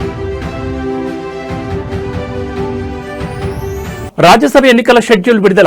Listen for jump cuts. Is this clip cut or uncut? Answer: cut